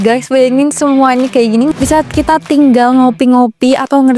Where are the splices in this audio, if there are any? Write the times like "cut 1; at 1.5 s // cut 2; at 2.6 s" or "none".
cut 1; at 1.7 s